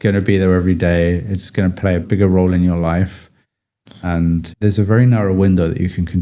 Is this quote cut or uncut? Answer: cut